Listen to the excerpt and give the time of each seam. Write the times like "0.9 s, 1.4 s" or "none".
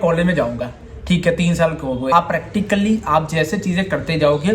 2.1 s